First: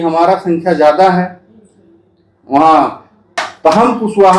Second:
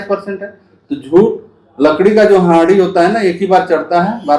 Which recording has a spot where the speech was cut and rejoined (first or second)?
first